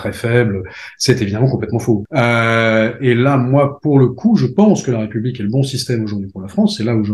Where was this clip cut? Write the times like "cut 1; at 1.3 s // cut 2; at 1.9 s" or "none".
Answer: cut 1; at 2.1 s